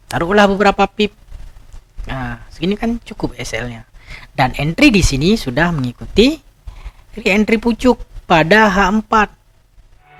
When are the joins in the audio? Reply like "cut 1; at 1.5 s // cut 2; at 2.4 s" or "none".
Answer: none